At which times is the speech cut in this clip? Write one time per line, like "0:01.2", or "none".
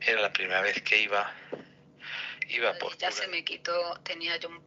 0:03.0